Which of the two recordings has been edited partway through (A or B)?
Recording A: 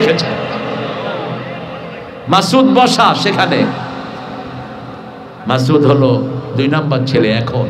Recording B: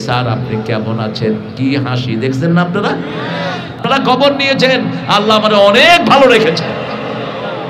B